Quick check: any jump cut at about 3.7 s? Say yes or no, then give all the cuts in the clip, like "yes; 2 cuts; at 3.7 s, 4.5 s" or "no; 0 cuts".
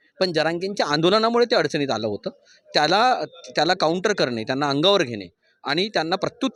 no; 0 cuts